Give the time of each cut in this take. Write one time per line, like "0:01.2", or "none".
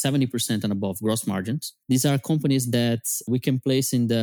0:01.7
0:03.3